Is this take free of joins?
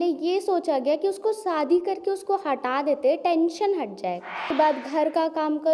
no; 1 cut; at 4.5 s

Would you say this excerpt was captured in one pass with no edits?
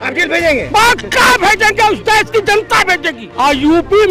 no; 1 cut; at 3.2 s

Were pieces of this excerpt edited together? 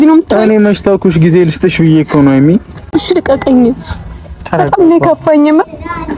yes; 1 cut; at 2.8 s

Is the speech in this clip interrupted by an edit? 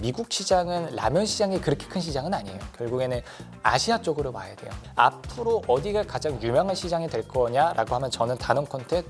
no; 0 cuts

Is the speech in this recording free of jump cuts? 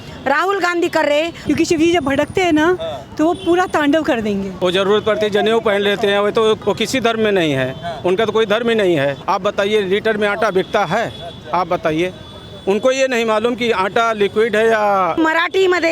no; 5 cuts; at 1.4 s, 4.5 s, 6.6 s, 9.2 s, 15.2 s

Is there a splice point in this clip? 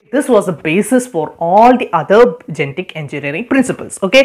no; 0 cuts

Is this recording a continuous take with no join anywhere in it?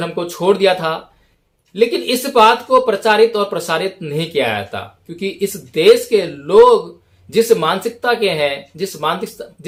yes; 0 cuts

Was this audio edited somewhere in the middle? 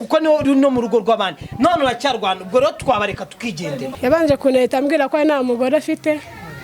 yes; 1 cut; at 3.9 s

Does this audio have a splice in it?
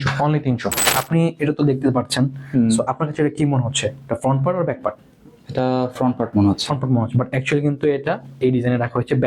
yes; 1 cut; at 0.9 s

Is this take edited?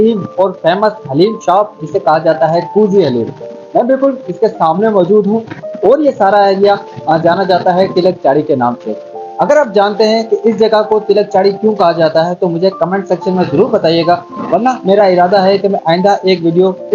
no; 0 cuts

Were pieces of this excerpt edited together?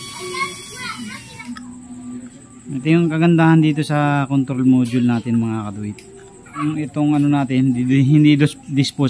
yes; 2 cuts; at 1.4 s, 6.6 s

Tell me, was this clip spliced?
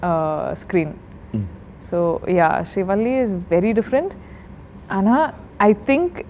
no; 0 cuts

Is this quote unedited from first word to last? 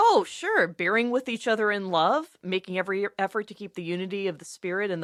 yes; 0 cuts

